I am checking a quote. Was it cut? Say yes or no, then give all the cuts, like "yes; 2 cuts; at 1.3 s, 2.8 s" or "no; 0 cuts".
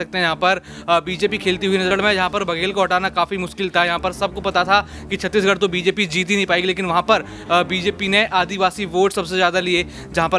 yes; 1 cut; at 1.9 s